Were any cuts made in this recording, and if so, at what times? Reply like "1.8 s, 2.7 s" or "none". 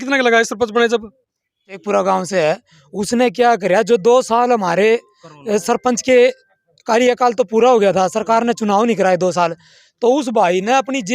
1.8 s